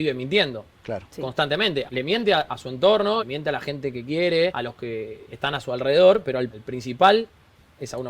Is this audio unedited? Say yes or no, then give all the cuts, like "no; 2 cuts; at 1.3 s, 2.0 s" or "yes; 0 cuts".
no; 4 cuts; at 1.9 s, 3.3 s, 4.5 s, 6.6 s